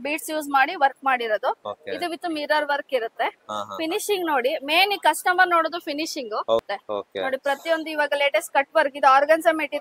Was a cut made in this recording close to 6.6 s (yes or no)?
yes